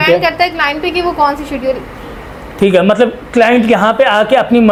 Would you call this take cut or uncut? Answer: uncut